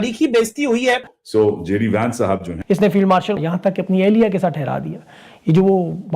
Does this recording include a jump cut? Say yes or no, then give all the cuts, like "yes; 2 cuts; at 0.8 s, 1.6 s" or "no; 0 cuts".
yes; 2 cuts; at 2.5 s, 3.4 s